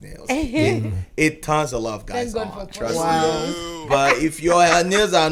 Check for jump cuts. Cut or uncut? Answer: uncut